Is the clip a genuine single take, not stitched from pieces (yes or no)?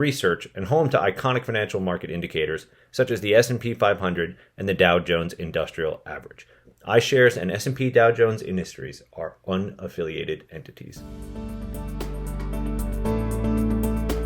no